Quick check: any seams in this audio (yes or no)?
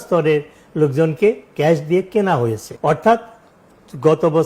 yes